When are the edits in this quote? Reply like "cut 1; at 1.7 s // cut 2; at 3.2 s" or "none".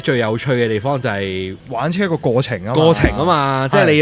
cut 1; at 1.6 s

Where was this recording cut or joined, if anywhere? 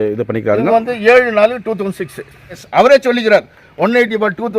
cut 1; at 2.6 s

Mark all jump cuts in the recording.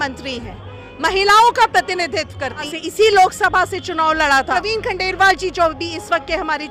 cut 1; at 2.7 s // cut 2; at 4.5 s

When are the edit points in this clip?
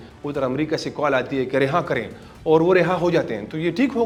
none

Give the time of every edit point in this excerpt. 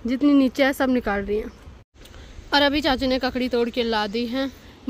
none

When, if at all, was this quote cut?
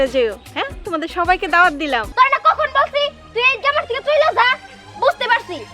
cut 1; at 2.1 s

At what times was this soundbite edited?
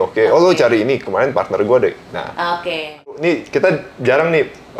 cut 1; at 3.1 s

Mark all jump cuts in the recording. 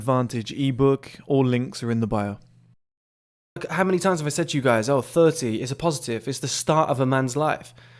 cut 1; at 3.6 s

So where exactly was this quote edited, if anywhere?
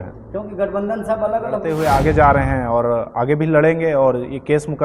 cut 1; at 1.7 s

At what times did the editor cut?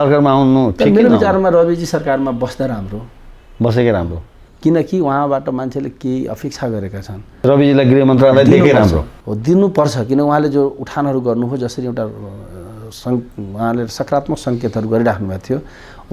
cut 1; at 7.4 s

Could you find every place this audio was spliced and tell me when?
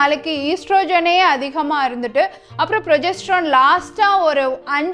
none

